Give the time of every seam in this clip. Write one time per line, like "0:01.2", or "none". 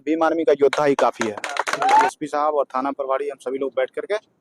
0:02.1